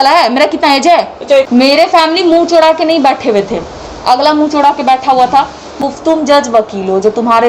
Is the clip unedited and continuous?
no; 2 cuts; at 1.5 s, 5.8 s

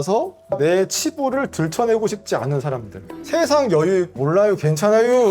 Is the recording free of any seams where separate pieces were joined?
no; 1 cut; at 2.9 s

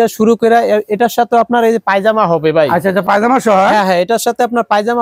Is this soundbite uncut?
yes; 0 cuts

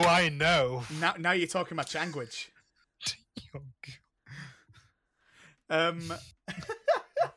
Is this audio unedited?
yes; 0 cuts

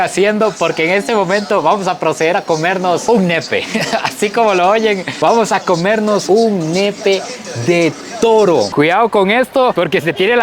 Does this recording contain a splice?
yes; 2 cuts; at 3.7 s, 8.7 s

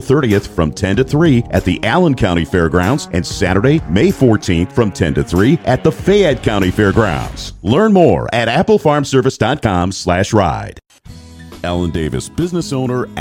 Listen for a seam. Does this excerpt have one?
yes; 1 cut; at 11.4 s

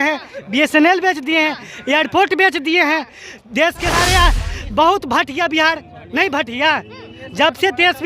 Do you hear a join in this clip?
yes; 1 cut; at 3.9 s

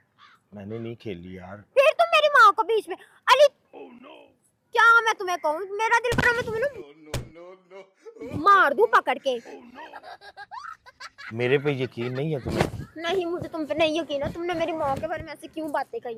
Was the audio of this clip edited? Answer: no; 0 cuts

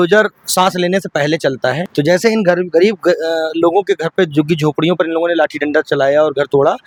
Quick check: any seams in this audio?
no; 0 cuts

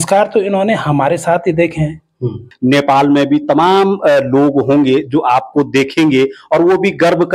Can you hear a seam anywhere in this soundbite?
yes; 1 cut; at 2.5 s

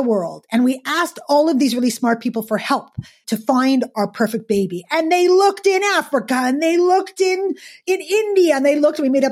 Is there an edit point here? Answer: yes; 2 cuts; at 3.2 s, 7.8 s

